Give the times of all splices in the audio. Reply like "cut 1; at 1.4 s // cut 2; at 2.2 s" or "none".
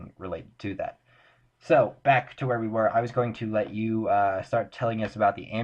cut 1; at 2.0 s